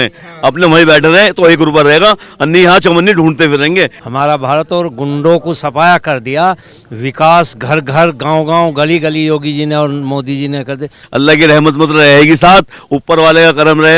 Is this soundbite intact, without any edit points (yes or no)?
no